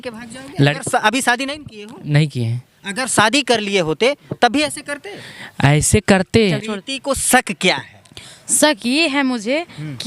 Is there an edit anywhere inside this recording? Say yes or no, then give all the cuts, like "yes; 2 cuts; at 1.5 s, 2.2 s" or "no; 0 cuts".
yes; 1 cut; at 6.6 s